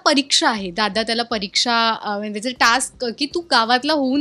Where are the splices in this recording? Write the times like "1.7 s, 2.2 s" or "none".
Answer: none